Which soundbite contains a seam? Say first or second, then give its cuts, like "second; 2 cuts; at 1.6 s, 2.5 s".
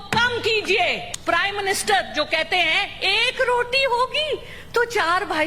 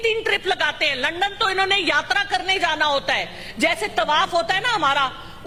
first; 1 cut; at 1.1 s